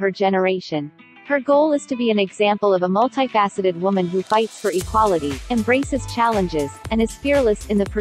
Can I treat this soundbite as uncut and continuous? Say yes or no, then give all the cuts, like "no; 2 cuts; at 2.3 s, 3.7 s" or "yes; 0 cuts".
yes; 0 cuts